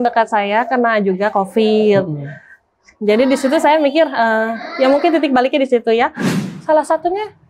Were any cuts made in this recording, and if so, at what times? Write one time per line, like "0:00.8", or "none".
0:06.3